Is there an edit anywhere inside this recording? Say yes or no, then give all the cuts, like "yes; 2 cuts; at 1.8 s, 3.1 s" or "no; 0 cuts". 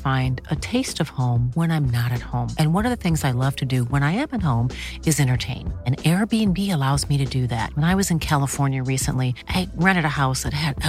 no; 0 cuts